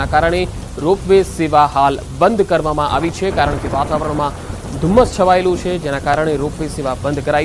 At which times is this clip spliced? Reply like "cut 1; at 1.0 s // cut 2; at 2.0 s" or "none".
none